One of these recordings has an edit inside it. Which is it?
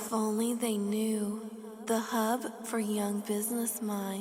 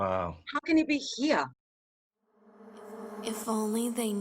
second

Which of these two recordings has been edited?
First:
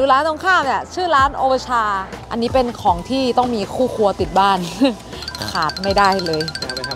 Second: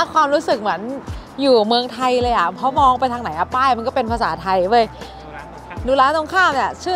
first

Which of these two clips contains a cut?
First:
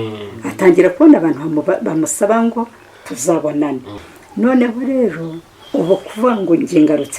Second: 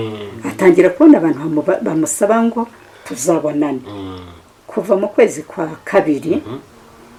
first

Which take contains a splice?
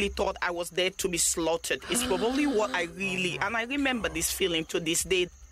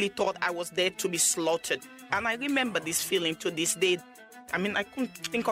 second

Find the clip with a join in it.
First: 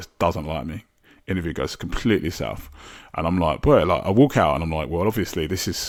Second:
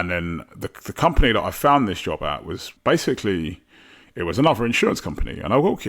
second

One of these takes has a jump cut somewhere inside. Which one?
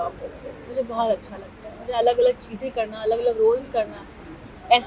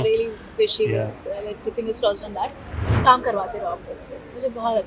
second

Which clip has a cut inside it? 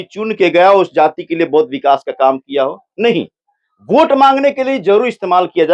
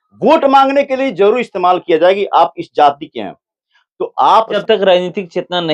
second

